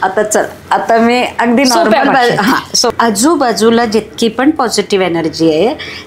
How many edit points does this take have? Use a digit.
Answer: 1